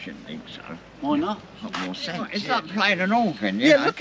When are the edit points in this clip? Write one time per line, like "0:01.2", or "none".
0:02.3